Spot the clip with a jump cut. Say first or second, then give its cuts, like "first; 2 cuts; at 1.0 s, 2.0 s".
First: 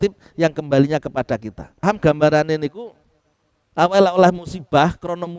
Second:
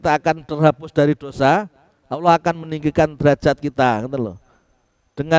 first; 1 cut; at 1.8 s